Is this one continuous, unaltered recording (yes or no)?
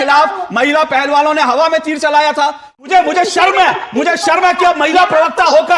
no